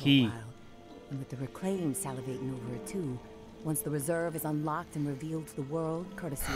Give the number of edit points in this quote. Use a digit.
0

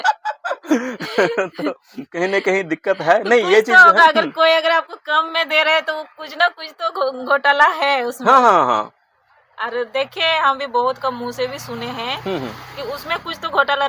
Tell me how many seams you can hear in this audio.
0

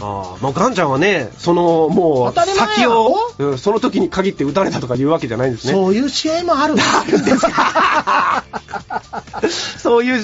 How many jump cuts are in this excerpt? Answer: 0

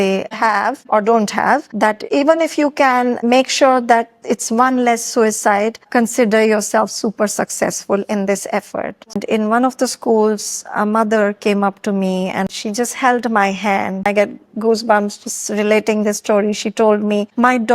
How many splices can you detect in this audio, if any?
3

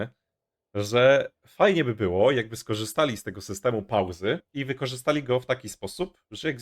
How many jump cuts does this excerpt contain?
1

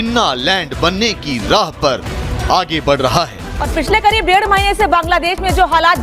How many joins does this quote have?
1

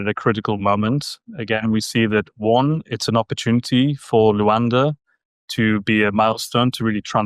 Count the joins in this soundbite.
0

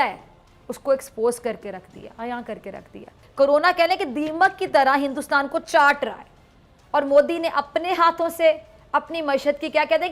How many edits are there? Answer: 1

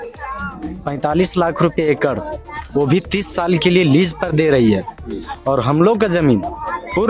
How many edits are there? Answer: 0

